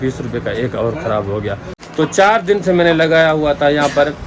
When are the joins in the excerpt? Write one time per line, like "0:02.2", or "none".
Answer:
0:01.8